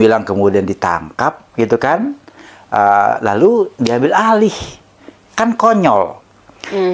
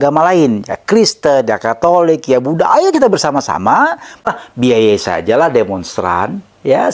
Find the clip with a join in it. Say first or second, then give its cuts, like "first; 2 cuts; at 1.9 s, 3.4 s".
second; 1 cut; at 4.3 s